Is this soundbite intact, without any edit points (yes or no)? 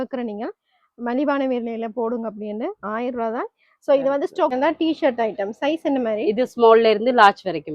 no